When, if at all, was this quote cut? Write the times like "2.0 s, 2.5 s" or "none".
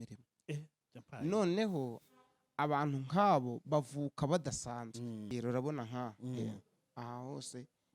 5.3 s